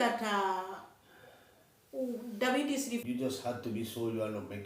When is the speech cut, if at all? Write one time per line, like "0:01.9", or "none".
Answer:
0:03.0